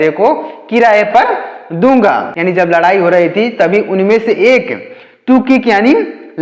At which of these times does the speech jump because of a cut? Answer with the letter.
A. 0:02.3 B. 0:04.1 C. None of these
A